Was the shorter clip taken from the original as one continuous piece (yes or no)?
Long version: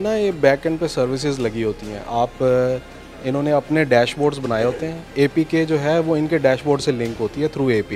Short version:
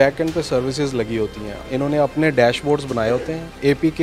no